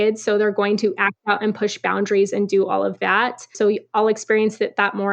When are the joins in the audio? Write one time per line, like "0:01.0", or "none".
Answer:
0:03.5